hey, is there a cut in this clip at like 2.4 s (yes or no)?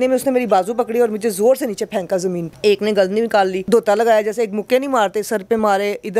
yes